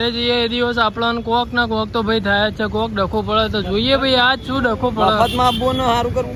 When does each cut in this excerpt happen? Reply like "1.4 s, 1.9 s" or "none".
none